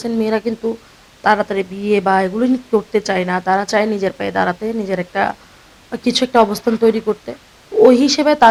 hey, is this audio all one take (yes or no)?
yes